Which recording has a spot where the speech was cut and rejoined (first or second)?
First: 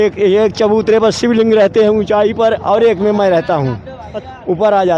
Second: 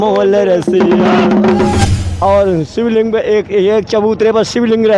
second